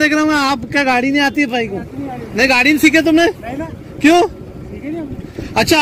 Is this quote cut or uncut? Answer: uncut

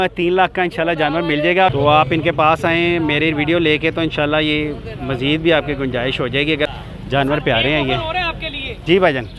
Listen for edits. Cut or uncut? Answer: cut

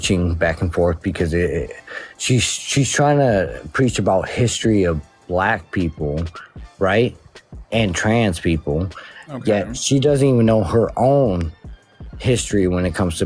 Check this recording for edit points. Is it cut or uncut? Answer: uncut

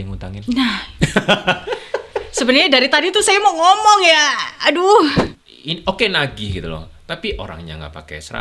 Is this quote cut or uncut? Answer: cut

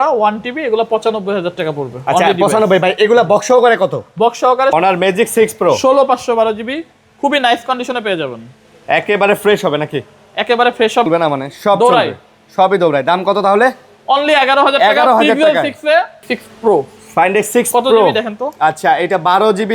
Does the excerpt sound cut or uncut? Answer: cut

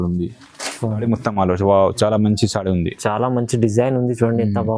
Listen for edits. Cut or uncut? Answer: cut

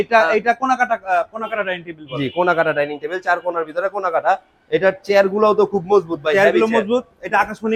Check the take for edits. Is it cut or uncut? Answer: uncut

